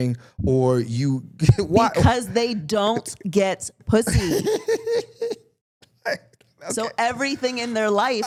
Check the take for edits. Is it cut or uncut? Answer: uncut